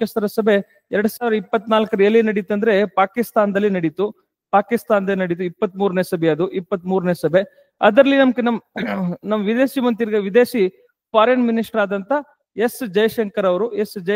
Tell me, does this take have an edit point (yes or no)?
no